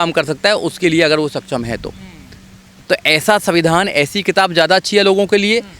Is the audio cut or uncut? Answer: cut